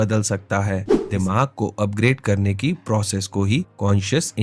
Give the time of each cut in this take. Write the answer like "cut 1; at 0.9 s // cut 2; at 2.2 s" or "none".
cut 1; at 1.0 s